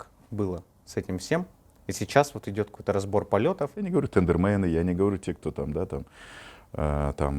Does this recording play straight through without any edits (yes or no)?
no